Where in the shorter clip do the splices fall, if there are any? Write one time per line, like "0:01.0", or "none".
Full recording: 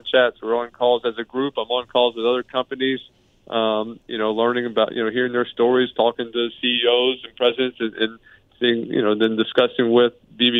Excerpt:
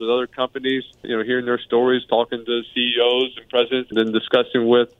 0:01.1
0:03.9

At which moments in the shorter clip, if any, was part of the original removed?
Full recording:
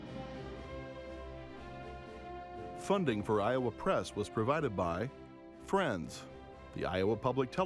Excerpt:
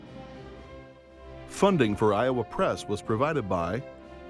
0:01.6

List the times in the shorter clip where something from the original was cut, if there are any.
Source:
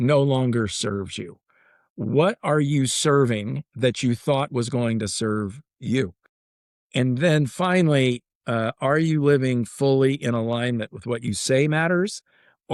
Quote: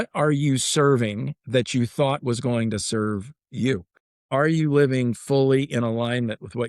0:04.2

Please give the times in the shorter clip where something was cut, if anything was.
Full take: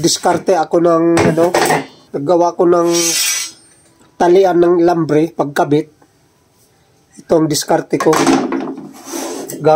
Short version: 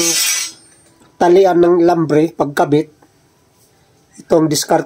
none

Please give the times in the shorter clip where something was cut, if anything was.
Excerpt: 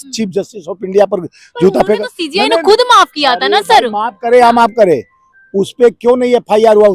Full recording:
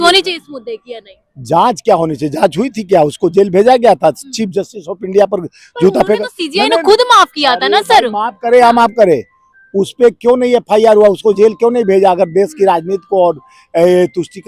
none

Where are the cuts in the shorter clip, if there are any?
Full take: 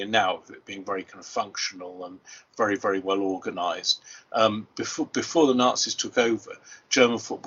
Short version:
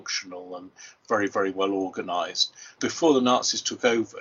0:02.8

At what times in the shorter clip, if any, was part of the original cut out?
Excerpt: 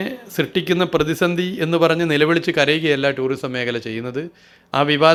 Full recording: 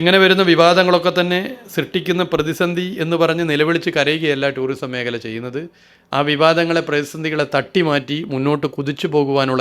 none

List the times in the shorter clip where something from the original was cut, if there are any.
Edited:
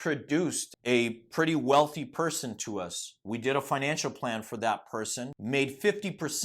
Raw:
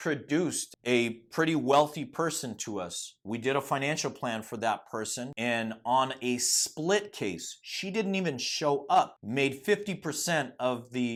0:05.3

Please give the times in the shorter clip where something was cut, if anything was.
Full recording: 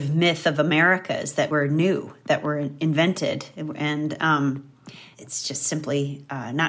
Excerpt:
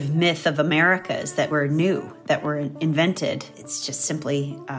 0:03.5

